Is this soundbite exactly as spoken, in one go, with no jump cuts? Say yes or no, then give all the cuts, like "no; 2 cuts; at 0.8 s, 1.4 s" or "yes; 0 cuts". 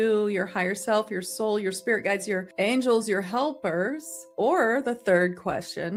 yes; 0 cuts